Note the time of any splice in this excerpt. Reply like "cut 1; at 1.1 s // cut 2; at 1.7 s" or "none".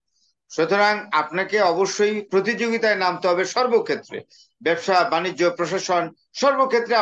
none